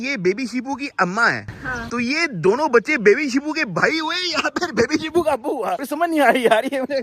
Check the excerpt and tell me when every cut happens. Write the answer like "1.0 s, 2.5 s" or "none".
none